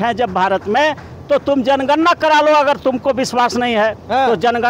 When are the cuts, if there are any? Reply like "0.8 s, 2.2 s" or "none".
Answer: none